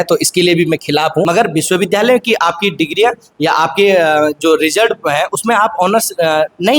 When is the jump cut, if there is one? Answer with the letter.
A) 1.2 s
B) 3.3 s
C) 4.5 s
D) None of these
A